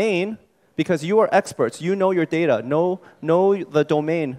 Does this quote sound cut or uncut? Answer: cut